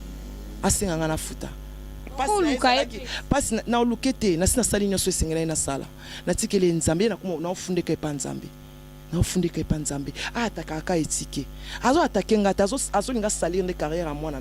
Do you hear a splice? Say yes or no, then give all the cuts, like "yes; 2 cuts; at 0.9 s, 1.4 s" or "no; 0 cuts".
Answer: no; 0 cuts